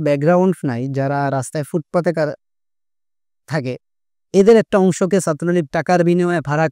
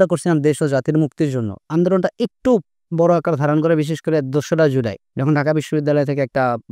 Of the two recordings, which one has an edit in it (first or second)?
second